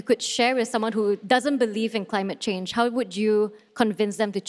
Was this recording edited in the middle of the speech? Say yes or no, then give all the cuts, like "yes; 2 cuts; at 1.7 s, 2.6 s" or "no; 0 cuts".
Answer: no; 0 cuts